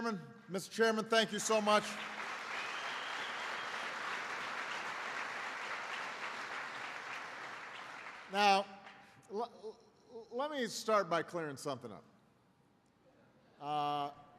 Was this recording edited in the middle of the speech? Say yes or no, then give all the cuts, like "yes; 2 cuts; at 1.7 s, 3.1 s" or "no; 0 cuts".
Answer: yes; 1 cut; at 4.3 s